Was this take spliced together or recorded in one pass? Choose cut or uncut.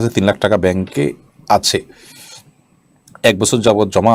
uncut